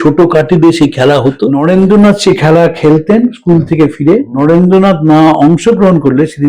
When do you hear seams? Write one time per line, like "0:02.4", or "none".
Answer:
0:01.7
0:04.0